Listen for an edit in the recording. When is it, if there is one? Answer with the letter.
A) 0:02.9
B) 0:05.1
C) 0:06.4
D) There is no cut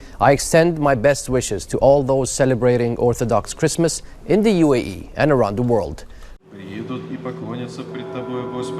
C